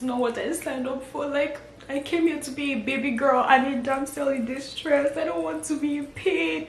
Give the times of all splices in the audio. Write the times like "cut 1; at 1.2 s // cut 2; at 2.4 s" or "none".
none

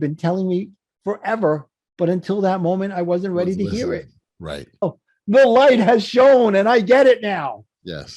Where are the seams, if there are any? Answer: cut 1; at 4.9 s

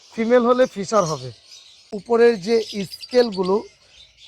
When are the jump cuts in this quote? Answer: cut 1; at 2.1 s

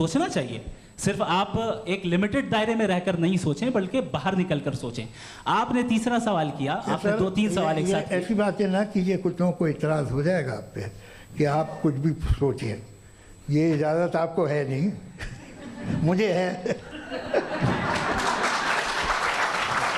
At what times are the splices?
none

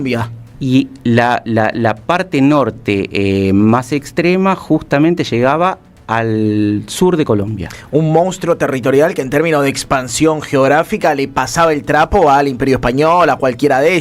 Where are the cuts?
none

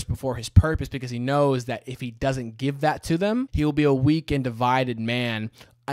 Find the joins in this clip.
cut 1; at 3.5 s

